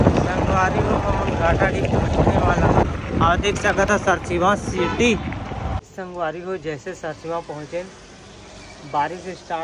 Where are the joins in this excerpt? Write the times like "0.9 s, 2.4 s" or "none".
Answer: 2.8 s, 5.8 s